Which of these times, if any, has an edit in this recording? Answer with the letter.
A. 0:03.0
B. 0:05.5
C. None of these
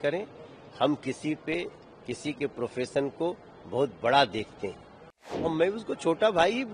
B